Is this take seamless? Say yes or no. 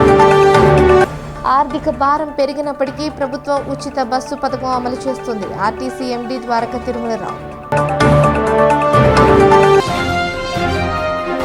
no